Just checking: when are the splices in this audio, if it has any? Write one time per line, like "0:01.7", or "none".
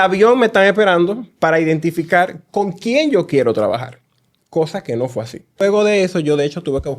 0:05.6